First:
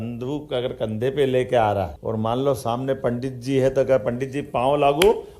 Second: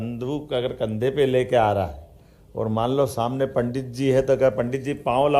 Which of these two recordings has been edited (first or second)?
first